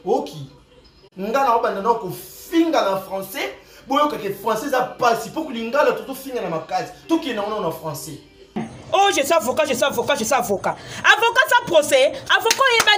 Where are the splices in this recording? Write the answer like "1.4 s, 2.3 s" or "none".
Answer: 8.6 s